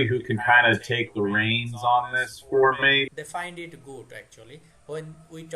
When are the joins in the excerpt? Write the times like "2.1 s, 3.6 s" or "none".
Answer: 3.1 s